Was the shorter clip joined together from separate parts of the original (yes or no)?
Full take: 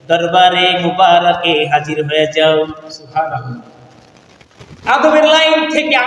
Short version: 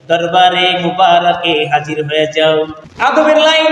yes